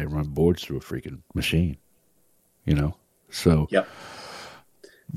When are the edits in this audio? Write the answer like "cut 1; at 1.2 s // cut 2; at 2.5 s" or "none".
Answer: cut 1; at 1.2 s

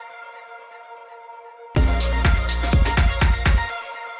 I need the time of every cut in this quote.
none

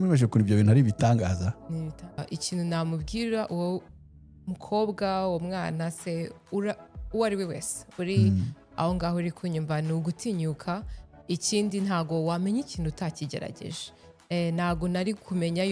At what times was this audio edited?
cut 1; at 2.3 s

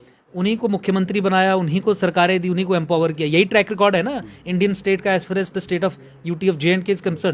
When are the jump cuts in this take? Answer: none

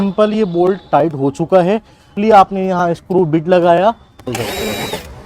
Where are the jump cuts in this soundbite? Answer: cut 1; at 2.1 s // cut 2; at 4.2 s

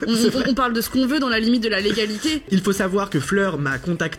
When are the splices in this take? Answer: cut 1; at 2.5 s

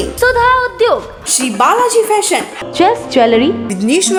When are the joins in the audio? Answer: none

